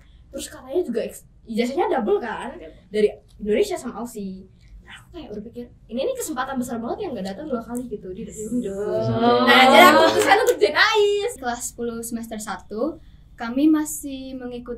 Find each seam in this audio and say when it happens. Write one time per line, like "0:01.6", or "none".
0:11.4